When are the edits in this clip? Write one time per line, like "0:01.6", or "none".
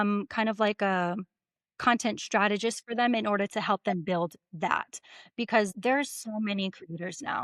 0:05.7